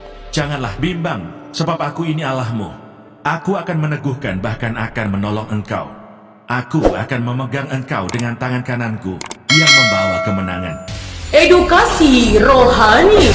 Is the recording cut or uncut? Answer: uncut